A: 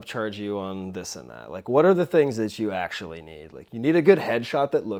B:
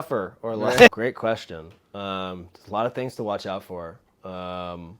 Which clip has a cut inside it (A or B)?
B